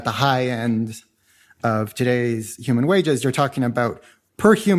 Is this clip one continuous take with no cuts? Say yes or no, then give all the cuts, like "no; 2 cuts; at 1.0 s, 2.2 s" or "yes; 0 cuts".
yes; 0 cuts